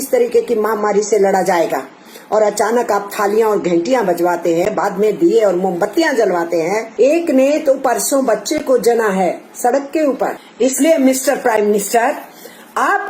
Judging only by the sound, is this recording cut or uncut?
cut